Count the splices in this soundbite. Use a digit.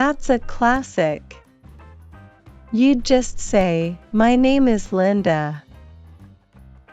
2